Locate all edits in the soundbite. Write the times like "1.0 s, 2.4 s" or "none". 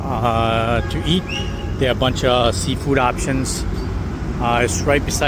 none

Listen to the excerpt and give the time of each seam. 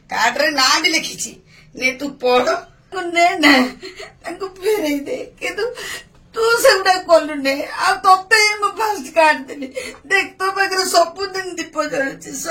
3.0 s

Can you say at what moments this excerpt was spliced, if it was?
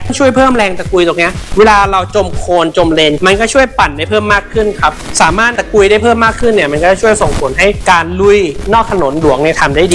3.2 s

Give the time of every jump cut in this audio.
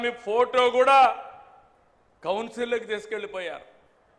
none

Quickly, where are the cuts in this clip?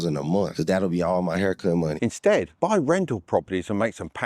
1.9 s

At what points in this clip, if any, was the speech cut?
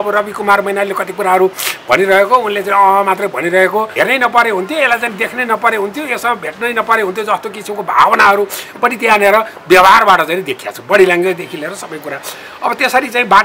3.9 s

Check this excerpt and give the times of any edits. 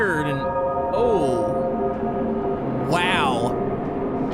none

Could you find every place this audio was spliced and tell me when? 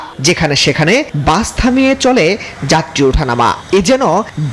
none

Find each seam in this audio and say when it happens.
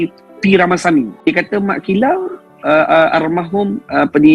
1.3 s

